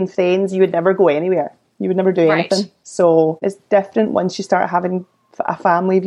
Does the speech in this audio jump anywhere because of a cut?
yes; 2 cuts; at 2.8 s, 3.5 s

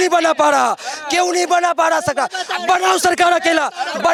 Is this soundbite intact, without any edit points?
yes; 0 cuts

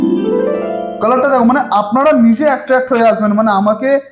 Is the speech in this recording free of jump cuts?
no; 1 cut; at 0.9 s

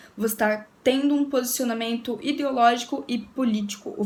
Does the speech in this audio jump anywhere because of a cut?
no; 0 cuts

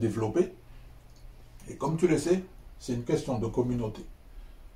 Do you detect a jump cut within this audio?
no; 0 cuts

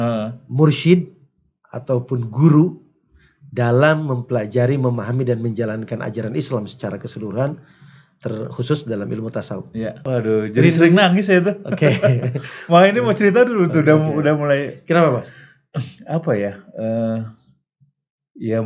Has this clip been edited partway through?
yes; 1 cut; at 10.0 s

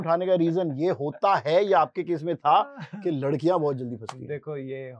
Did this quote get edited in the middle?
no; 0 cuts

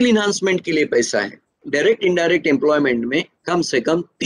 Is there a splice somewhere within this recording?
yes; 1 cut; at 1.6 s

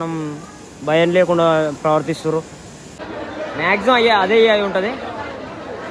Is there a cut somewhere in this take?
yes; 1 cut; at 2.9 s

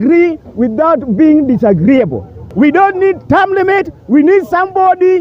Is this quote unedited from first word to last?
no; 1 cut; at 2.4 s

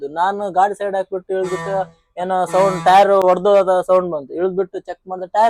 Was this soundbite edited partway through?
no; 0 cuts

